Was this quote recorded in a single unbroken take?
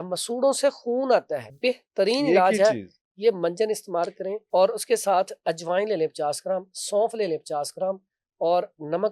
no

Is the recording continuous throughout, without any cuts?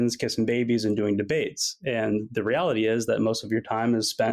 yes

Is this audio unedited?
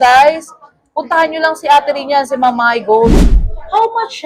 no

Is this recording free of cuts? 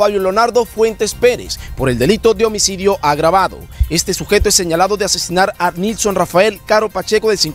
yes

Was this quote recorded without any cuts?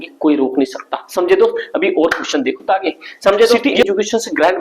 no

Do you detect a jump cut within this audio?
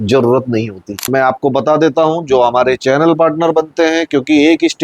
yes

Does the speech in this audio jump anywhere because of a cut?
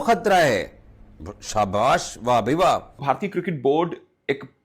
yes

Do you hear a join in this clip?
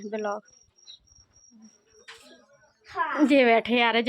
yes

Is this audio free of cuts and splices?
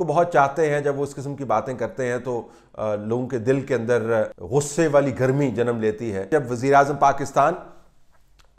no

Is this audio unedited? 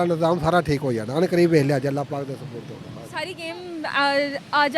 no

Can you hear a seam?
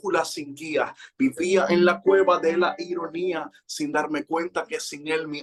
no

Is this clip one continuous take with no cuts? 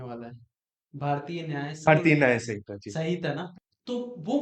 no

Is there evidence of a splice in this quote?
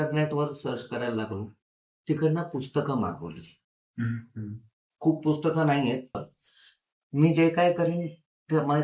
yes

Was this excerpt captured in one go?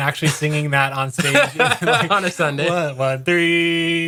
yes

